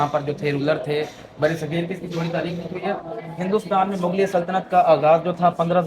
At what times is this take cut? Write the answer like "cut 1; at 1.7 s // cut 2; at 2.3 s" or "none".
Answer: none